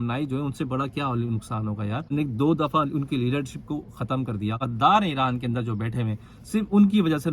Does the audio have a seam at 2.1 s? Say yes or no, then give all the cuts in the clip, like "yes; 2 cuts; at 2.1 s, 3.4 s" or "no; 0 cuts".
yes; 2 cuts; at 2.1 s, 4.7 s